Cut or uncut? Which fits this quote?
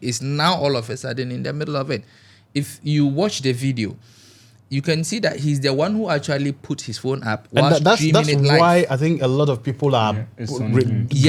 uncut